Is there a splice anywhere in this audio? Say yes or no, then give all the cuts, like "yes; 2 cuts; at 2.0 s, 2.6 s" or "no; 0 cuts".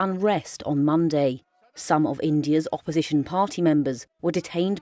no; 0 cuts